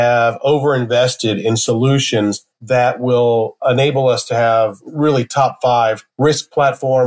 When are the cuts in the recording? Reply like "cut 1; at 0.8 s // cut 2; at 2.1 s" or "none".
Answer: cut 1; at 4.8 s